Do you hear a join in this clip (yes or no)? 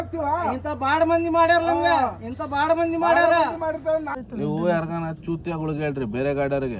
yes